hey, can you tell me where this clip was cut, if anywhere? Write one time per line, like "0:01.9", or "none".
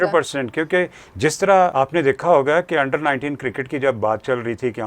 0:01.7

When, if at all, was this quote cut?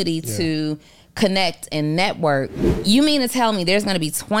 0:02.6

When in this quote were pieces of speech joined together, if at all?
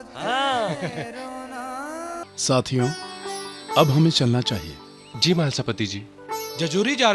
0:02.2

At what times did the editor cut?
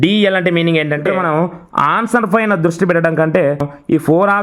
0:01.5
0:03.5

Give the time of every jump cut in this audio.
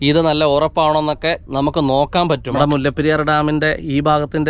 0:02.6

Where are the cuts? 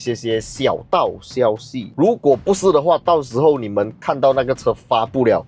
0:01.9

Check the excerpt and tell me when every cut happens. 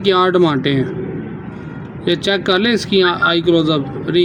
none

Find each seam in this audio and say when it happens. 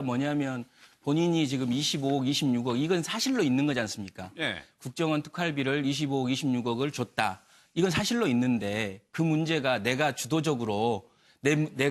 0:05.4

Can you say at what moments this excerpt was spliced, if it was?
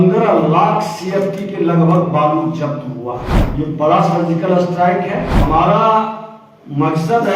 0:03.4
0:05.4

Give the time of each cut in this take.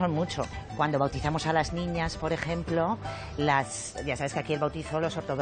none

